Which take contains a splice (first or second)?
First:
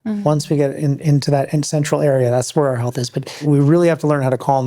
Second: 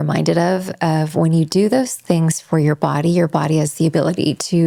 first